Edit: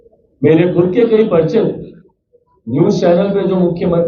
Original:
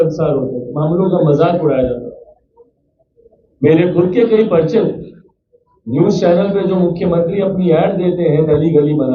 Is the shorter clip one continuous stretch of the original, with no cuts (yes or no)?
yes